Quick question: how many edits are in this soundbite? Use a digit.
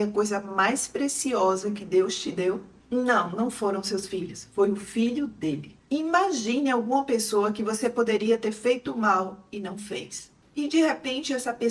2